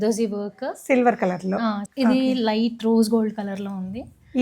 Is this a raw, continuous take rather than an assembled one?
no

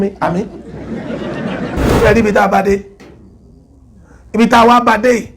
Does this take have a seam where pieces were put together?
yes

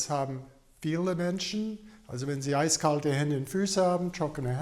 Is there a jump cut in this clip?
no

